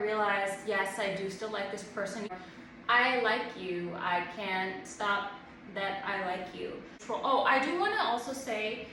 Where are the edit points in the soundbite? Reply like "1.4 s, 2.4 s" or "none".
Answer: 2.3 s, 6.9 s